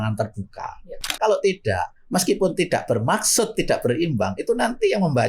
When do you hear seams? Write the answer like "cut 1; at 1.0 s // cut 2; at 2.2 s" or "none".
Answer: cut 1; at 1.2 s